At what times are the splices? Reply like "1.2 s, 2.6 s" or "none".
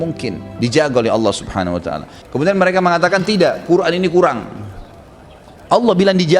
2.1 s